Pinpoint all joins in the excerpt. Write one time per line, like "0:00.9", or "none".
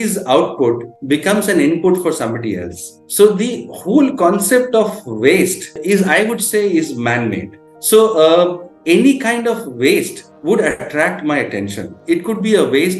0:08.7